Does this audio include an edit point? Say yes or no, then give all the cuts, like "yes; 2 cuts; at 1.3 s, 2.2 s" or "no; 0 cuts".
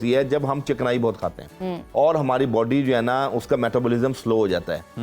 no; 0 cuts